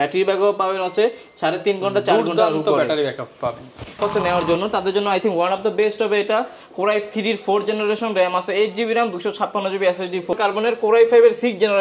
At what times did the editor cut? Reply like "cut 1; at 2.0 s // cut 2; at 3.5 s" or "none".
cut 1; at 4.0 s // cut 2; at 10.3 s